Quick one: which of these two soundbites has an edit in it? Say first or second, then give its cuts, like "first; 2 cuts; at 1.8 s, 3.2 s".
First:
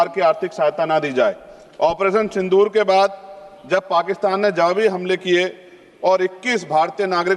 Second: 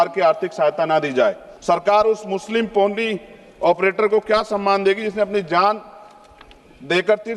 second; 1 cut; at 1.5 s